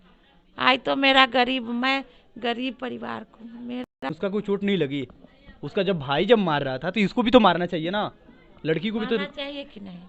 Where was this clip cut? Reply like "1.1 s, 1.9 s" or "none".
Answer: 4.1 s

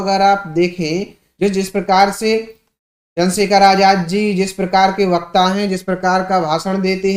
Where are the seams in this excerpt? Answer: none

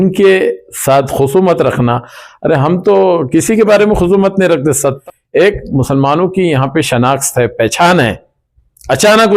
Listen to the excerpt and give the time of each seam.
5.0 s

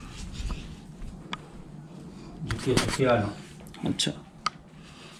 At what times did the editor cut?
none

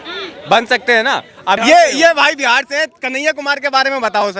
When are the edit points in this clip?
none

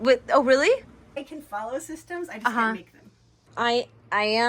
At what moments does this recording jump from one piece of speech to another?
1.1 s, 3.5 s

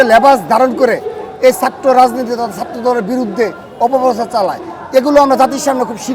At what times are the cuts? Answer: none

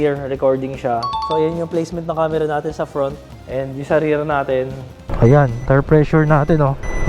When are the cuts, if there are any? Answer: 3.3 s, 5.1 s

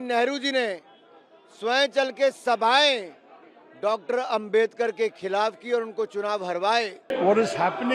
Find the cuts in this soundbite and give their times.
7.0 s

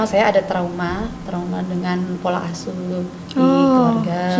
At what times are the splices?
none

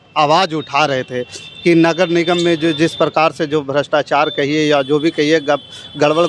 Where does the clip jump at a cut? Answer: none

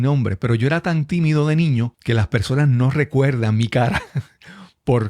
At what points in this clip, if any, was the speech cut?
2.0 s

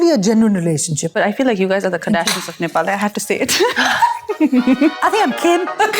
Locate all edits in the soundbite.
1.1 s, 5.0 s

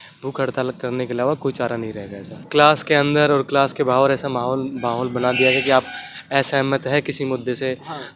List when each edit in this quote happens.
2.4 s

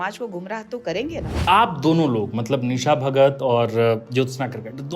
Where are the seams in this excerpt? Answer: 1.4 s

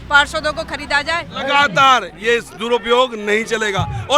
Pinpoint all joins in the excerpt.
1.3 s

